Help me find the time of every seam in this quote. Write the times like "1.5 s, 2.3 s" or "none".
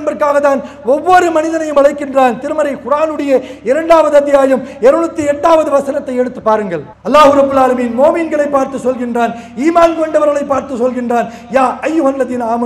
6.9 s